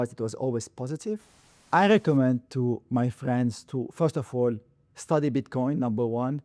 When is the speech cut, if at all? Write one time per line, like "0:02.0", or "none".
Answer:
0:01.5